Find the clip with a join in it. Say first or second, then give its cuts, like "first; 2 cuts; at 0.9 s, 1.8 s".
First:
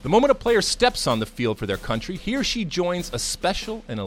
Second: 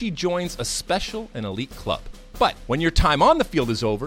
second; 1 cut; at 2.5 s